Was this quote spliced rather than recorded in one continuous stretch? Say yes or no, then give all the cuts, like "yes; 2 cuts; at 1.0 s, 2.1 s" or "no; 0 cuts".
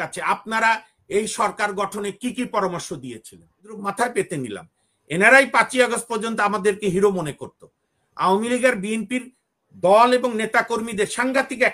yes; 1 cut; at 3.7 s